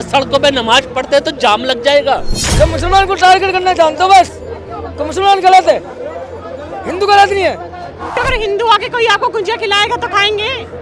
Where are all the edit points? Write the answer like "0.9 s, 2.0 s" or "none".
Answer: 2.4 s, 8.2 s